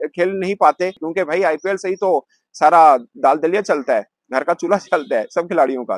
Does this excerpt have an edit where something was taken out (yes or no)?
yes